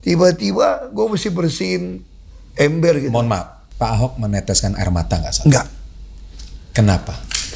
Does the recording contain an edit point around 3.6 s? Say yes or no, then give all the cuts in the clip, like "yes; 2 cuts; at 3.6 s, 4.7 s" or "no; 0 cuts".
yes; 1 cut; at 3.6 s